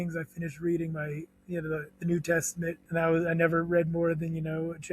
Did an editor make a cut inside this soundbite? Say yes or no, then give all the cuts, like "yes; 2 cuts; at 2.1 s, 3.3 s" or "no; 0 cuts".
yes; 1 cut; at 2.8 s